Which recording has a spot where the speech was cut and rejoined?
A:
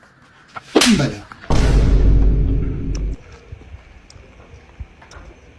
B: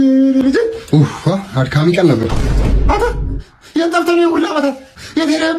A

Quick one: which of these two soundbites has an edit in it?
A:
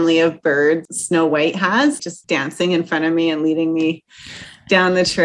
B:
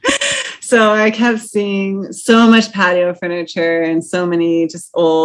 A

